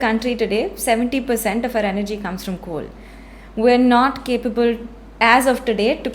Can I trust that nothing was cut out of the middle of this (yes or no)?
yes